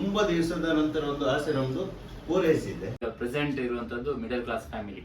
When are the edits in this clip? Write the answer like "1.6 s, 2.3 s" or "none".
3.0 s